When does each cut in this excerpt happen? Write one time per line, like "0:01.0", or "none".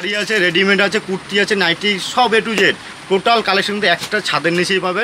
none